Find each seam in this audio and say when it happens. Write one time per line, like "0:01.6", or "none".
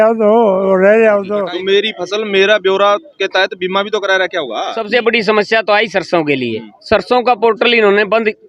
0:01.4
0:04.7